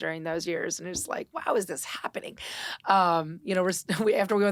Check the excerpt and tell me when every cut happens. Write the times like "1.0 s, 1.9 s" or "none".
none

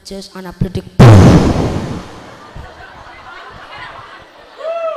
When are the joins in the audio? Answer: none

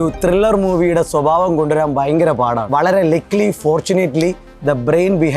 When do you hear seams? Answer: 2.6 s

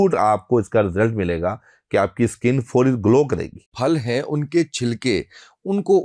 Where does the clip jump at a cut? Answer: 3.7 s

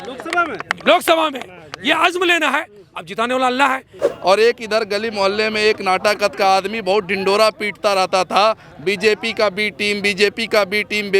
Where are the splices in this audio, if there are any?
3.9 s

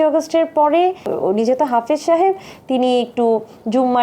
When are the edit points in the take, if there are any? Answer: 1.1 s

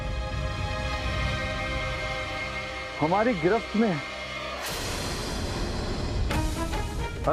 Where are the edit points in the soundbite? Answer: none

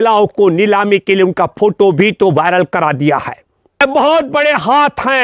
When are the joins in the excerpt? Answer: 3.7 s

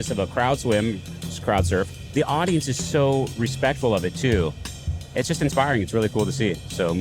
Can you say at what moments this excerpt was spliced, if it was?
2.0 s

